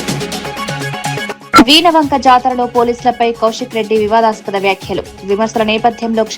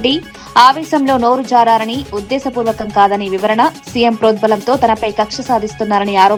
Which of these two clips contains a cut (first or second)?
first